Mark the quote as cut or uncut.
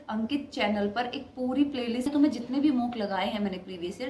cut